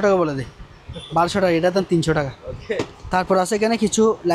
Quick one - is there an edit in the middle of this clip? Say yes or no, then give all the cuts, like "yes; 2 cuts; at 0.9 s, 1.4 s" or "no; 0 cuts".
no; 0 cuts